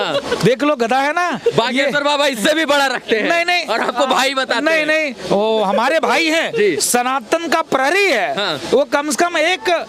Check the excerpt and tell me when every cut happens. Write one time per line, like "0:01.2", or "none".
none